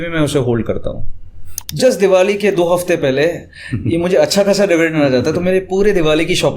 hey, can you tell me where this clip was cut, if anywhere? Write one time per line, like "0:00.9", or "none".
0:01.6